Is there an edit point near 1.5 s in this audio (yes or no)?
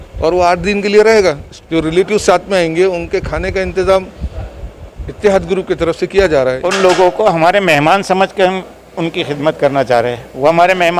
yes